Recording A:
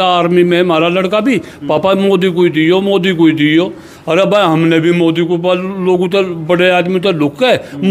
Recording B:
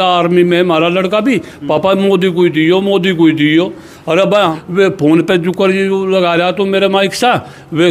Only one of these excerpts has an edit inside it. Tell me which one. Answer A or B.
B